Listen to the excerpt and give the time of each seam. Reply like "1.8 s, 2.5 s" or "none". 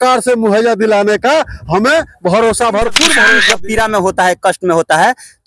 3.4 s

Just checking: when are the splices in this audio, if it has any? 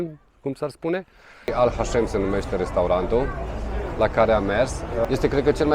1.5 s, 5.0 s

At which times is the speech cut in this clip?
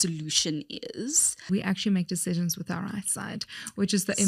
1.5 s

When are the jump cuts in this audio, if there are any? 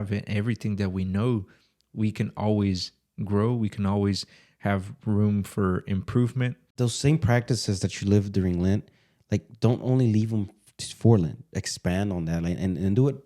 6.6 s

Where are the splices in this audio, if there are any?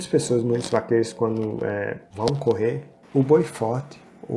2.0 s, 2.9 s

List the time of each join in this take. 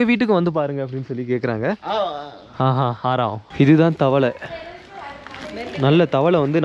3.4 s

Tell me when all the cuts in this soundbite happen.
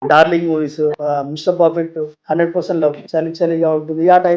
1.0 s, 2.1 s, 3.0 s

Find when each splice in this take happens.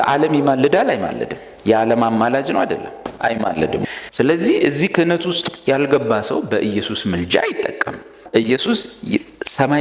4.0 s, 8.1 s

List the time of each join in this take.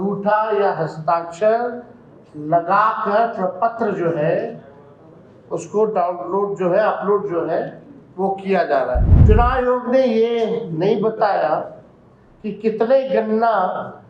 9.1 s

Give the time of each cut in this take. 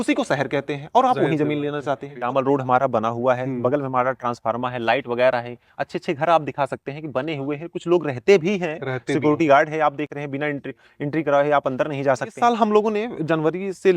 2.1 s, 12.3 s

